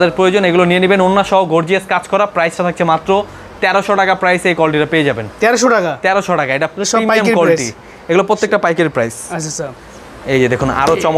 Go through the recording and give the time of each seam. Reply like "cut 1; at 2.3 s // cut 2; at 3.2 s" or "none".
none